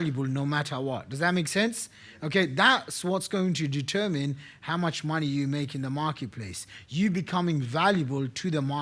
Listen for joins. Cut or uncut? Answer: uncut